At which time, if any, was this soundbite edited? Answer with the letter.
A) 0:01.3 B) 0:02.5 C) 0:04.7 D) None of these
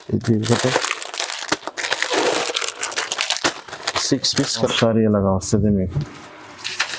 C